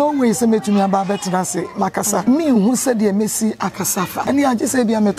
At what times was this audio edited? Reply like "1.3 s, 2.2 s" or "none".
2.2 s, 4.2 s